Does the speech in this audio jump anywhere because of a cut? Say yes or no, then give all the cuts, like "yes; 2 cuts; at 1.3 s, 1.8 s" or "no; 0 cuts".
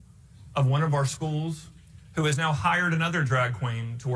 no; 0 cuts